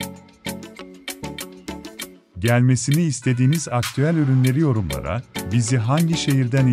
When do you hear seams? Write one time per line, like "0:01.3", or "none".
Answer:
0:02.4